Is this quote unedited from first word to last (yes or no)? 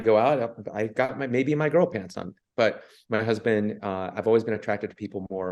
yes